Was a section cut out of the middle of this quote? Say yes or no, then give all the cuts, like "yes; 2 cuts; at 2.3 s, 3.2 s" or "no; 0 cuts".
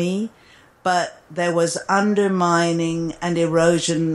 no; 0 cuts